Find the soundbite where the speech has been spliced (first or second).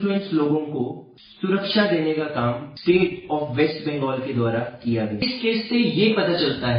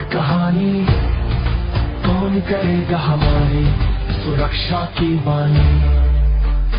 first